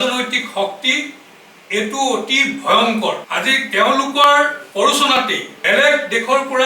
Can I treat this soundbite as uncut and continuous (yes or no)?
no